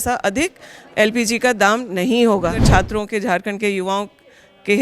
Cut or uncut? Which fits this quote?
cut